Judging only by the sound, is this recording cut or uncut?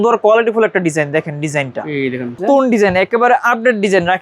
cut